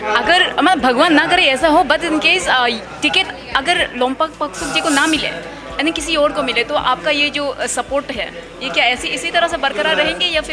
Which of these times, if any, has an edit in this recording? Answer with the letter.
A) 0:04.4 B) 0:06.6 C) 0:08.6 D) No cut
D